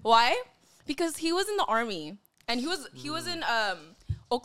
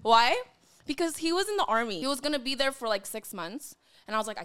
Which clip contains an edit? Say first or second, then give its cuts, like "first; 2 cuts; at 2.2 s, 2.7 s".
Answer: second; 1 cut; at 2.0 s